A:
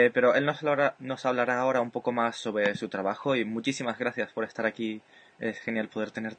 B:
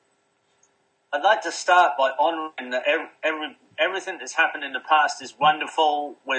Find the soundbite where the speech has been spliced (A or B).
A